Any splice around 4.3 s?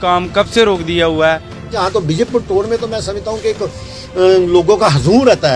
no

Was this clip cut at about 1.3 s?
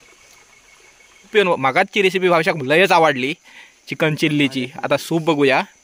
yes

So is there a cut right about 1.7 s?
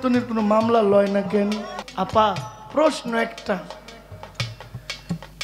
yes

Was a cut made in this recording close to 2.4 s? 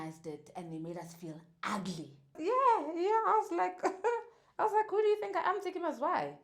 yes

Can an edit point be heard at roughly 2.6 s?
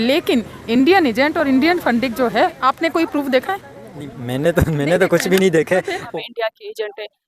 yes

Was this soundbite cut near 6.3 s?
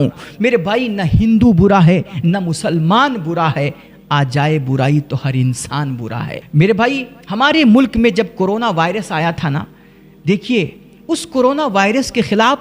yes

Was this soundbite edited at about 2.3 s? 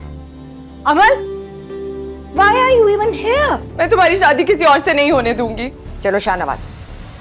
no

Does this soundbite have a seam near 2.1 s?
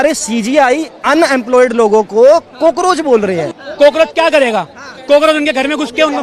no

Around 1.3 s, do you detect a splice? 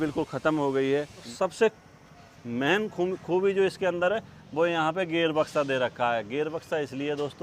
yes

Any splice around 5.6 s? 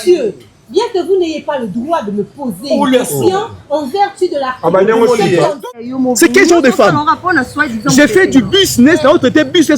yes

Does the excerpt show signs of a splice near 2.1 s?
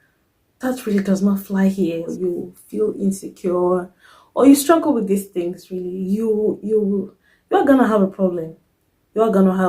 yes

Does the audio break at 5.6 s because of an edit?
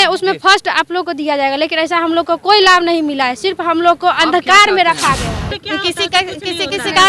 yes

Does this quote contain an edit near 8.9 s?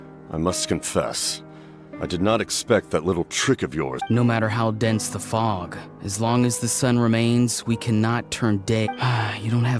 yes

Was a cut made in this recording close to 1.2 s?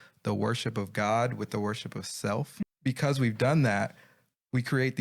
no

